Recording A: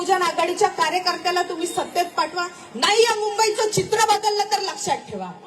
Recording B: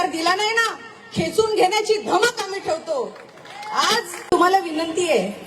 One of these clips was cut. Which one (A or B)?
B